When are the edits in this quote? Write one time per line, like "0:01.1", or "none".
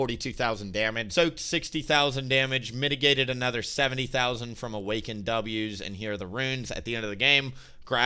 0:01.0